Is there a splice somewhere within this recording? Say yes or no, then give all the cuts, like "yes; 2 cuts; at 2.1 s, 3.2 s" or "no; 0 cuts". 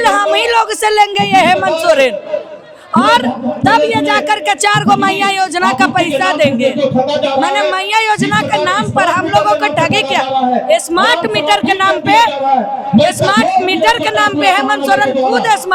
no; 0 cuts